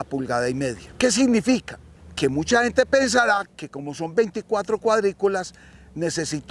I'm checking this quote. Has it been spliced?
no; 0 cuts

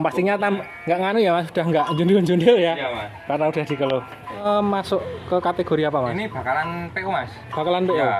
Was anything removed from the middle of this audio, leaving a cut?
yes; 1 cut; at 4.4 s

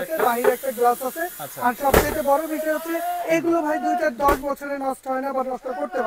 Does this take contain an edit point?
no; 0 cuts

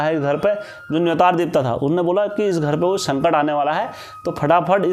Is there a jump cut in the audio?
no; 0 cuts

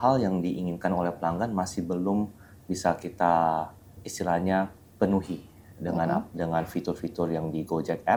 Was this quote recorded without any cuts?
yes; 0 cuts

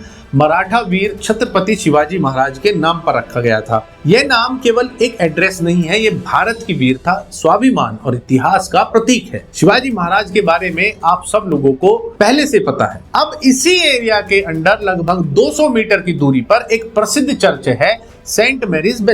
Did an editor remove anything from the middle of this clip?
no; 0 cuts

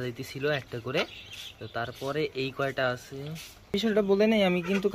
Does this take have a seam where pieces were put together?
yes; 1 cut; at 3.7 s

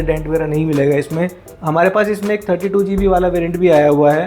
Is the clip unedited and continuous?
yes; 0 cuts

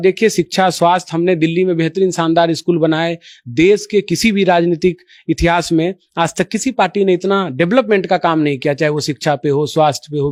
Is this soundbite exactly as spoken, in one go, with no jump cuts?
yes; 0 cuts

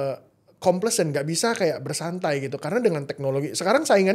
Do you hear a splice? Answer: no; 0 cuts

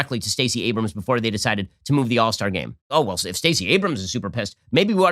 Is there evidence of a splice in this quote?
yes; 1 cut; at 2.9 s

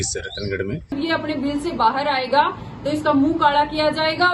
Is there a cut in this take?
yes; 1 cut; at 0.9 s

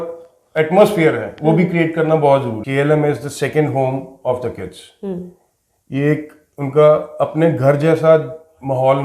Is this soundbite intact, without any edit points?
no; 1 cut; at 2.6 s

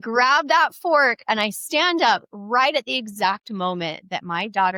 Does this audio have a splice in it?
no; 0 cuts

